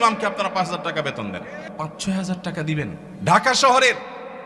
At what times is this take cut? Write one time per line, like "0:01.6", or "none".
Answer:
0:01.6
0:03.1